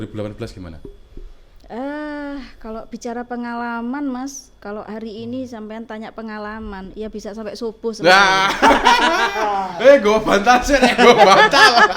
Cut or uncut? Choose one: uncut